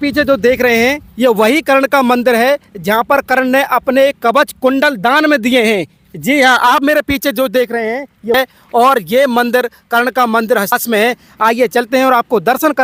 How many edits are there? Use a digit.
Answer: 0